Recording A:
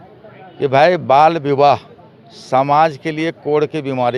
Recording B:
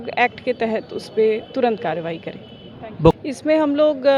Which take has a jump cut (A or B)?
B